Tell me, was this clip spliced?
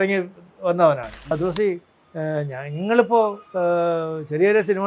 yes; 1 cut; at 1.3 s

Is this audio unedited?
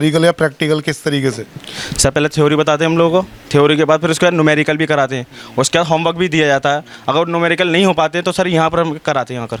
yes; 0 cuts

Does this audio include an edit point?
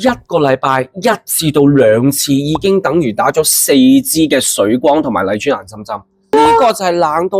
yes; 1 cut; at 6.3 s

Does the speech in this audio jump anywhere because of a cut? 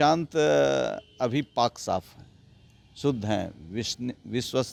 no; 0 cuts

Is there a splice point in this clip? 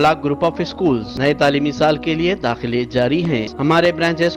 yes; 2 cuts; at 1.1 s, 3.5 s

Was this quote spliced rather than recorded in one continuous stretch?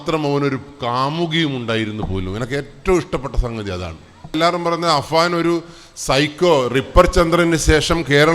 yes; 1 cut; at 4.3 s

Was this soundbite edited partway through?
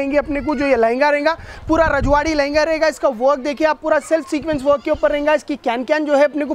no; 0 cuts

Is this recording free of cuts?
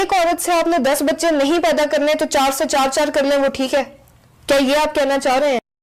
yes; 0 cuts

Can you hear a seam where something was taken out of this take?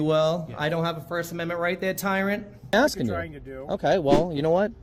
yes; 1 cut; at 2.7 s

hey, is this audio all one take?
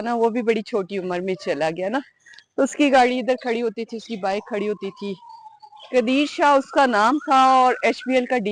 yes; 0 cuts

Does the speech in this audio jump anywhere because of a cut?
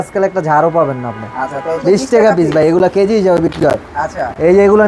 yes; 1 cut; at 1.8 s

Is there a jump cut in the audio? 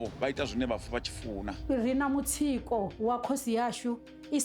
yes; 1 cut; at 1.6 s

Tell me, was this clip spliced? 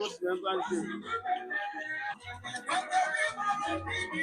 yes; 1 cut; at 2.2 s

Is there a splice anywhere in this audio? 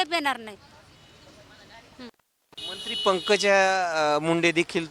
no; 0 cuts

